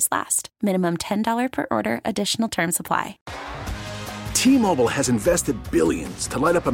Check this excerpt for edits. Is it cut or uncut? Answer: cut